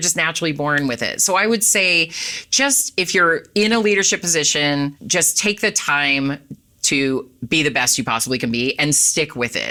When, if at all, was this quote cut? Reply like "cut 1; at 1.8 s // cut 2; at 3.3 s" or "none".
none